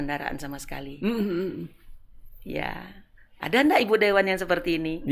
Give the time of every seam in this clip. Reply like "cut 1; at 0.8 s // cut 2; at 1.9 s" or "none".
none